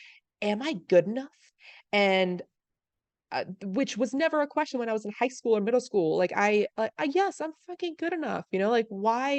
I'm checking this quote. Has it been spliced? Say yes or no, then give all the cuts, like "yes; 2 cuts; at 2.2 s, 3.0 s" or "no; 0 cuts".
no; 0 cuts